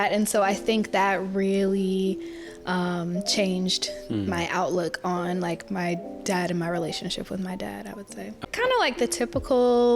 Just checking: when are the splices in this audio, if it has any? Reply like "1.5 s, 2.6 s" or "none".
8.4 s